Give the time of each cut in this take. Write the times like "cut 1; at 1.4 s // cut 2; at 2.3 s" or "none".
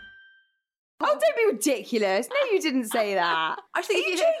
cut 1; at 1.0 s